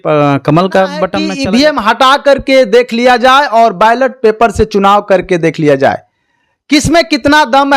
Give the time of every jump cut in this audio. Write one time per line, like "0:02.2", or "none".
0:01.2